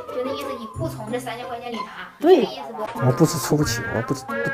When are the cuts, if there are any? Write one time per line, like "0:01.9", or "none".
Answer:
0:02.8